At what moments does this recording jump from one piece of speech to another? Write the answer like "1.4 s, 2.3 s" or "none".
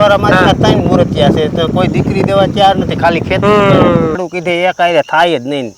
4.2 s